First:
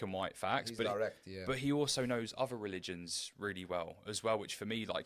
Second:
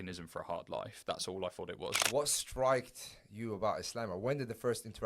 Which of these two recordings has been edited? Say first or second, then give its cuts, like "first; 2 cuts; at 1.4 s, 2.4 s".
second; 1 cut; at 2.0 s